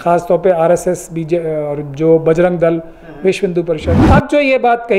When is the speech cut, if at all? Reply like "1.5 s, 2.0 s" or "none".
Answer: 3.9 s